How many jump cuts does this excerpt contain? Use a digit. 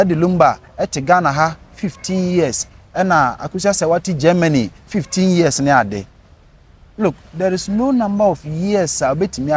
0